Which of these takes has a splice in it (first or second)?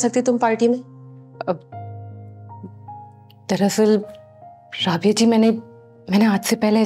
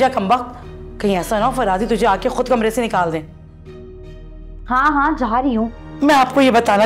second